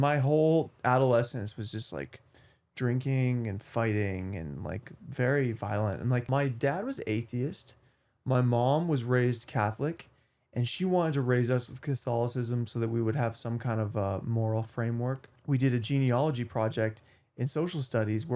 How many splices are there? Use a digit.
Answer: 2